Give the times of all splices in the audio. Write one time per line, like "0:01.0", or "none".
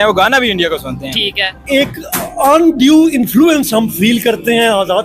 0:01.6